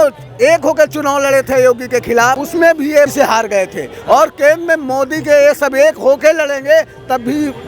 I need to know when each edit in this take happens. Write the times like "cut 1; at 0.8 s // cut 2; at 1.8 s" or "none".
cut 1; at 2.4 s // cut 2; at 3.1 s